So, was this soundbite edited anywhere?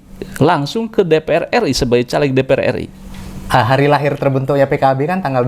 yes; 1 cut; at 2.9 s

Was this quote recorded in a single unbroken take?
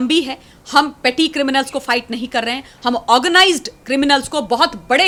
yes; 0 cuts

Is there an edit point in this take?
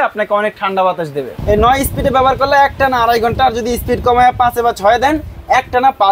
yes; 1 cut; at 1.3 s

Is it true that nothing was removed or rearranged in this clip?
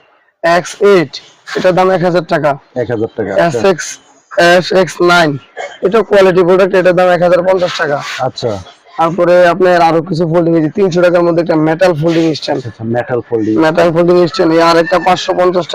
yes; 0 cuts

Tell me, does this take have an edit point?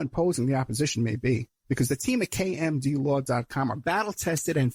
no; 0 cuts

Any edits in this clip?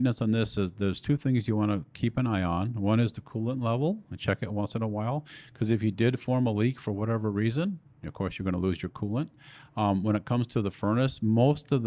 no; 0 cuts

